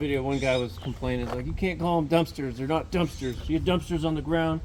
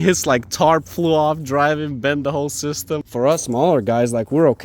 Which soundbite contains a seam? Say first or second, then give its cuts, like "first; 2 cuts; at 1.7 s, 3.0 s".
second; 1 cut; at 3.3 s